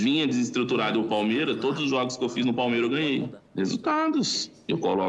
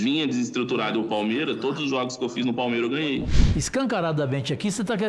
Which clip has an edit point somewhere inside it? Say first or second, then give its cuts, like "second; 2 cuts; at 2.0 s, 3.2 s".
second; 1 cut; at 3.4 s